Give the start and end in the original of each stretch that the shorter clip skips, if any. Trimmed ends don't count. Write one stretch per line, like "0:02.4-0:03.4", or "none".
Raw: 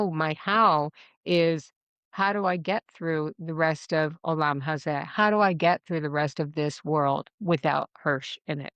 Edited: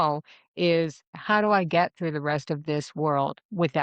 0:01.9-0:05.1